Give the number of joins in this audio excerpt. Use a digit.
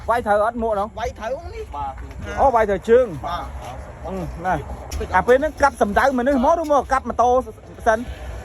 1